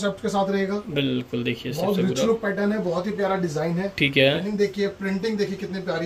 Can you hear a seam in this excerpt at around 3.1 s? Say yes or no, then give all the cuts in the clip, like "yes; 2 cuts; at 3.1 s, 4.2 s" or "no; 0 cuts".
no; 1 cut; at 4.4 s